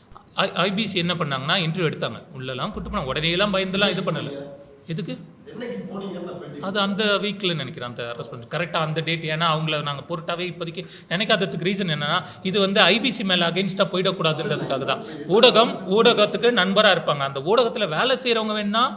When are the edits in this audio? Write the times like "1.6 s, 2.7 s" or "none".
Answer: none